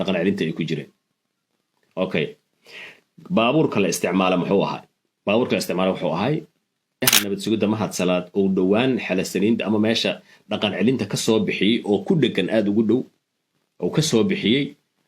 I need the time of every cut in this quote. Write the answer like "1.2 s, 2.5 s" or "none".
7.3 s